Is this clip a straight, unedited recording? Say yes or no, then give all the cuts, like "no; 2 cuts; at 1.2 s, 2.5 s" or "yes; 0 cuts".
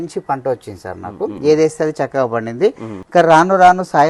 no; 1 cut; at 2.9 s